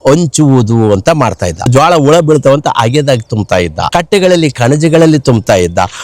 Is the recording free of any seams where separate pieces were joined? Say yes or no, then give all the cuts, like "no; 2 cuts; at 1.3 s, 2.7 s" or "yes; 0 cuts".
no; 2 cuts; at 1.7 s, 3.9 s